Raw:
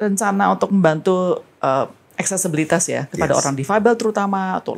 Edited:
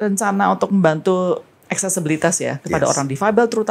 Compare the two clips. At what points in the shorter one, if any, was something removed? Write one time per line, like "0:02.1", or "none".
0:01.5